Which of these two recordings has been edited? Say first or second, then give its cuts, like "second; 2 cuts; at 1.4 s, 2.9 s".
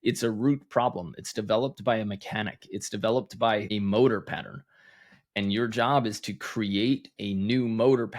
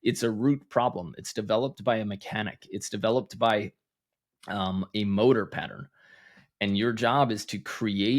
first; 1 cut; at 3.7 s